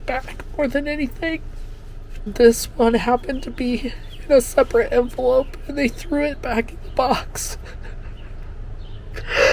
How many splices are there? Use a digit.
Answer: 2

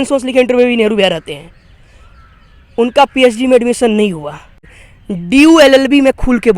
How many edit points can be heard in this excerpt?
1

